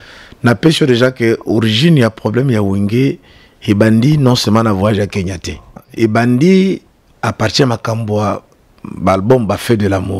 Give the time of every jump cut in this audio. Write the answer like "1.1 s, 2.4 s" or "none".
5.8 s